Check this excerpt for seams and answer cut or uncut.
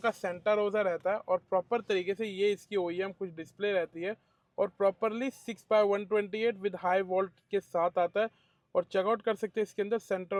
uncut